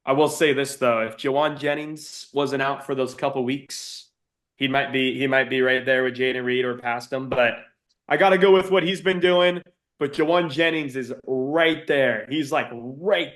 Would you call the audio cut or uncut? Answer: cut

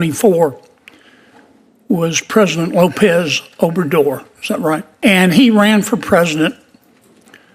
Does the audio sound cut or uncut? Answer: cut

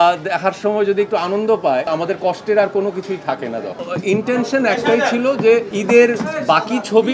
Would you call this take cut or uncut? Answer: cut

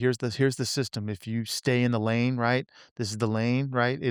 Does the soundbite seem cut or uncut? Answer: uncut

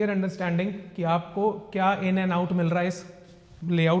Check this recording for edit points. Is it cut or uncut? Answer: uncut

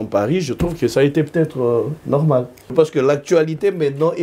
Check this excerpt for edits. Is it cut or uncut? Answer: cut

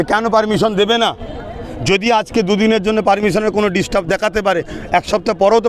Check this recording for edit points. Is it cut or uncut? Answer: uncut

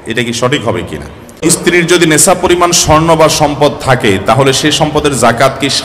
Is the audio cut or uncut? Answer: cut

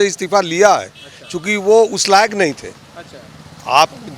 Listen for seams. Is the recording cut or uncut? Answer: uncut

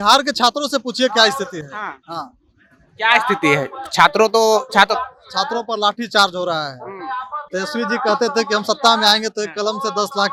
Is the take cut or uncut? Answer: uncut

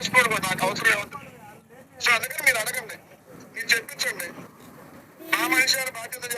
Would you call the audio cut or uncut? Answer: cut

